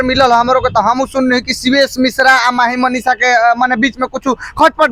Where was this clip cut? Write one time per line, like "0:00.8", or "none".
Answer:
none